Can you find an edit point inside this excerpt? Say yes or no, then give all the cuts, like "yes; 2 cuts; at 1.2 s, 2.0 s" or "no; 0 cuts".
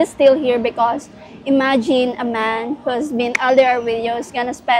no; 0 cuts